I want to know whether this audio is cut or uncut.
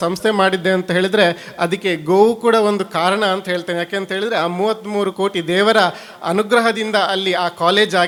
uncut